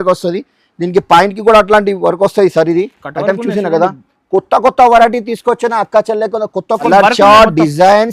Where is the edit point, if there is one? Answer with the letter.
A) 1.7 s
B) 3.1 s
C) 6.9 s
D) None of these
C